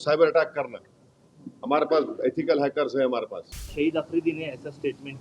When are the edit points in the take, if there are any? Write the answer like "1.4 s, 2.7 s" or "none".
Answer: 3.6 s

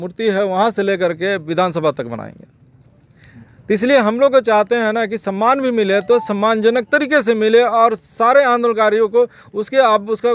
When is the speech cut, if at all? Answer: none

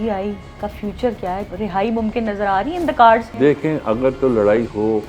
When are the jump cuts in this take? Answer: 1.5 s, 3.3 s

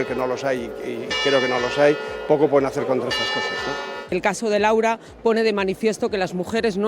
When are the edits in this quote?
4.1 s

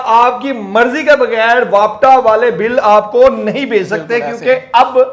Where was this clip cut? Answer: none

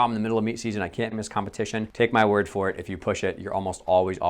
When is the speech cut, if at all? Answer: 1.1 s

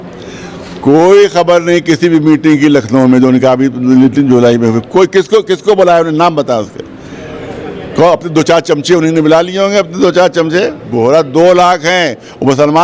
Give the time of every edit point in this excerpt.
10.8 s

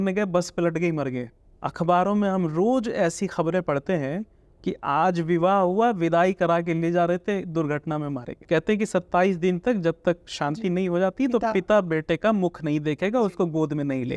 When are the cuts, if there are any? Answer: 1.4 s, 8.3 s

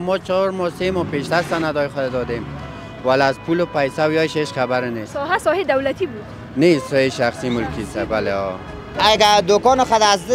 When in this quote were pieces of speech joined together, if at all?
8.9 s

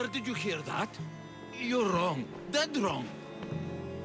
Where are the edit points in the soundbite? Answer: 3.1 s

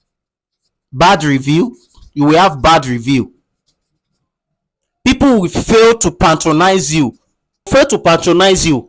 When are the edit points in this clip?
7.7 s

